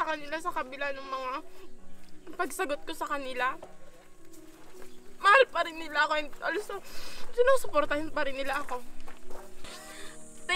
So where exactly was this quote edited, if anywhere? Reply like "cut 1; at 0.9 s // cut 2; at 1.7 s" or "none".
cut 1; at 9.6 s